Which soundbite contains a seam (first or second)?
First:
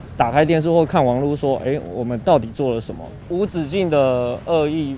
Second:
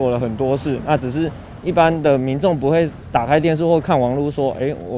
first